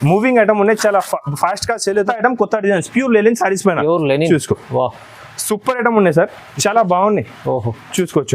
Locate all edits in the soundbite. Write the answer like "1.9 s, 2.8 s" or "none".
2.0 s

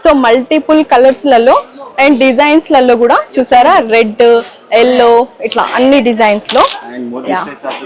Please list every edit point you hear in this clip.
none

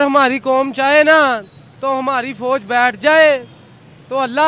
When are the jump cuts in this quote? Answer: none

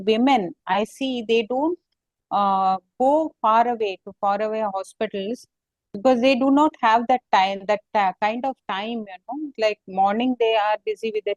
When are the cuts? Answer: none

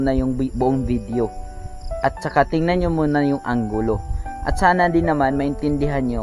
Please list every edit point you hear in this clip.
none

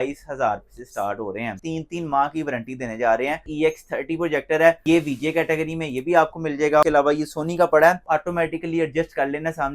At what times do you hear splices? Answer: 1.6 s, 3.5 s, 4.8 s, 6.8 s, 8.0 s

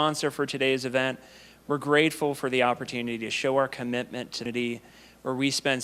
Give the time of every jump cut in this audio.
4.5 s

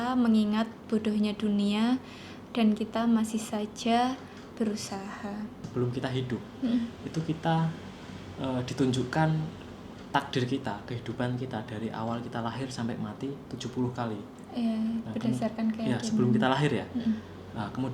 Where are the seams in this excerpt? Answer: 5.6 s

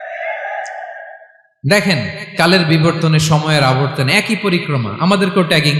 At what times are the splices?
none

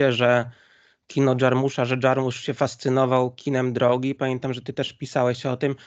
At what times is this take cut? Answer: none

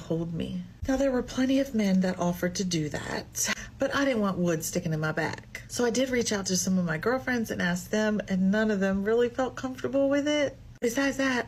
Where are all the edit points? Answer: none

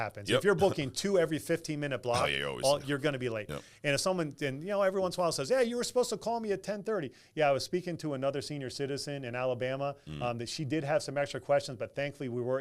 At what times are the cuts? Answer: 0.9 s

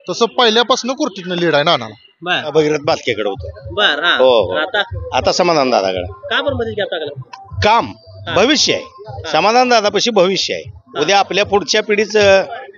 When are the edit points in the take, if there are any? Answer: 2.5 s

